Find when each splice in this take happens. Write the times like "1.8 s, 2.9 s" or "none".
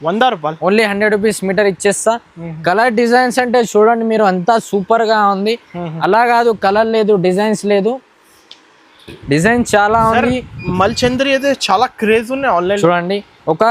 9.1 s